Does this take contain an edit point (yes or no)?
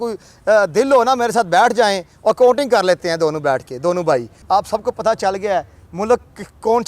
yes